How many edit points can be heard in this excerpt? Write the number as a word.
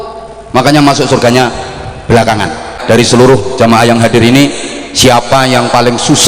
one